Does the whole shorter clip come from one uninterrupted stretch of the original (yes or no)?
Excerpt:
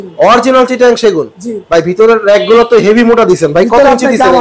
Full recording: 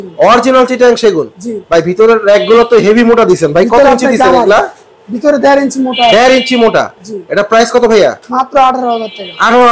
yes